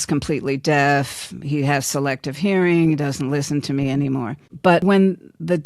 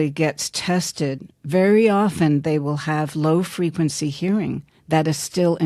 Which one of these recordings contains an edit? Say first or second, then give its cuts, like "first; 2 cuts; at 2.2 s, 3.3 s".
first; 1 cut; at 4.6 s